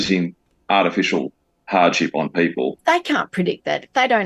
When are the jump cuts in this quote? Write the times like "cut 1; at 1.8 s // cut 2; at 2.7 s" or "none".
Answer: cut 1; at 2.8 s